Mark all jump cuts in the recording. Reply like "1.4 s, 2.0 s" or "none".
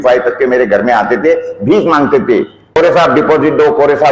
2.6 s